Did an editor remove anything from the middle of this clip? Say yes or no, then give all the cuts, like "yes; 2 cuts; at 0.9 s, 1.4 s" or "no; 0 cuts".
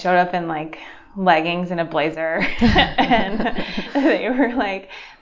no; 0 cuts